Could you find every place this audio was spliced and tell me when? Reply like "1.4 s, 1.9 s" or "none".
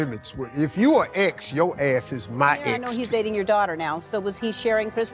2.9 s